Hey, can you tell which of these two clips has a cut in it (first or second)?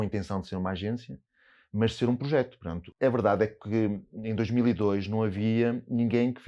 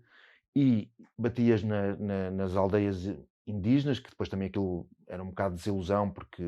first